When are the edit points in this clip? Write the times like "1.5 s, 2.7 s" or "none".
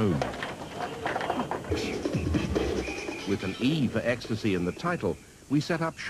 none